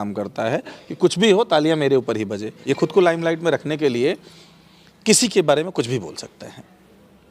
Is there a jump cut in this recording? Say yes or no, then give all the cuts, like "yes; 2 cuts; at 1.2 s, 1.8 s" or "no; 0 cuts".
yes; 1 cut; at 2.5 s